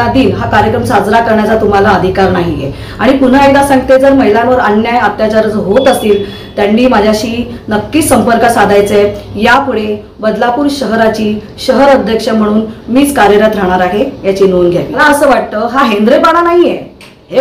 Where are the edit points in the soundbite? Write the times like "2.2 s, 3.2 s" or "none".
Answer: 15.0 s